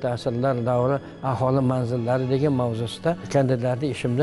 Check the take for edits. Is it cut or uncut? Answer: cut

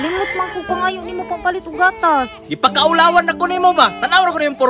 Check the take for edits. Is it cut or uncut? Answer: uncut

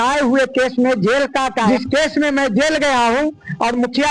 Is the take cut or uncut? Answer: cut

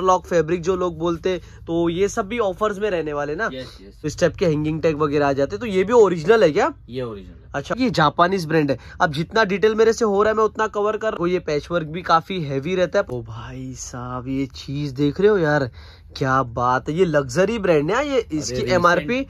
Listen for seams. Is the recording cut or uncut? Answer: cut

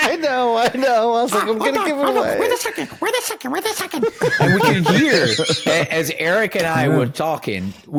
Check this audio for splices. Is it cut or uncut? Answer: uncut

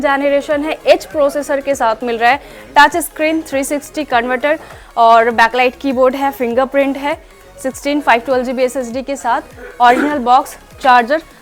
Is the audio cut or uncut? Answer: uncut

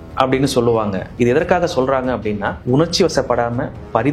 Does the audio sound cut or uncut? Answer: cut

